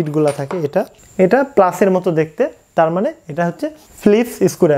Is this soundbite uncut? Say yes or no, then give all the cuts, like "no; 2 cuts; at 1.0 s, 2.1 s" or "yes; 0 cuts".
no; 2 cuts; at 1.0 s, 3.9 s